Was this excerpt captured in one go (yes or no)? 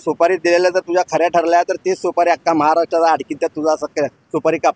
yes